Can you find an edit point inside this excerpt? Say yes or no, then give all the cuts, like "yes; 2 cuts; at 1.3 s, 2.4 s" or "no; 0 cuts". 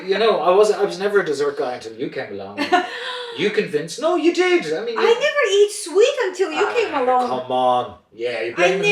no; 0 cuts